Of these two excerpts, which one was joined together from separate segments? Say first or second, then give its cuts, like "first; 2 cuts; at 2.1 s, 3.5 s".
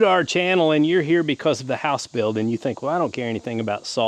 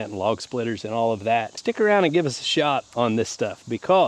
second; 1 cut; at 1.5 s